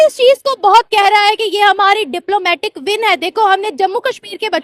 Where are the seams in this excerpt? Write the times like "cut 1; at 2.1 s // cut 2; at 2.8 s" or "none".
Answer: none